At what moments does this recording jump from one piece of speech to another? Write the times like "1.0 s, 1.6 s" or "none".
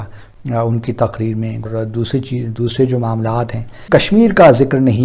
1.6 s, 3.8 s

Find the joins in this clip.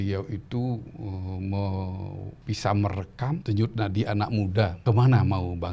2.3 s, 3.4 s, 4.8 s

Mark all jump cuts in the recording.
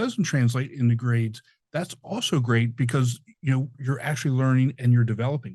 3.8 s, 4.8 s

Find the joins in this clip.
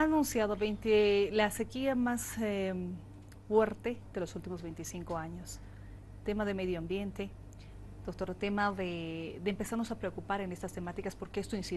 5.5 s

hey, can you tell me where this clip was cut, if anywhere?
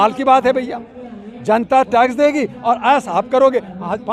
none

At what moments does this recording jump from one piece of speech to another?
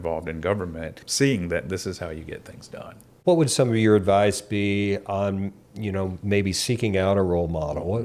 1.0 s, 3.0 s

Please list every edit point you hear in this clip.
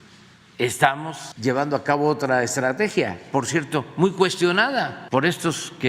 1.2 s, 5.0 s

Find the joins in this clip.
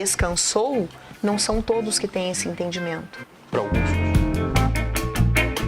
3.7 s

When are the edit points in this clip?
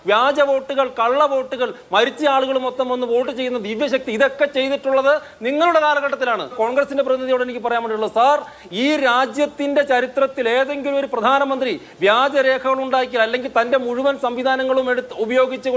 6.5 s

